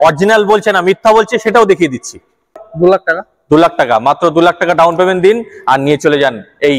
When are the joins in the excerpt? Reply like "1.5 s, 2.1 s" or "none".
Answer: 2.5 s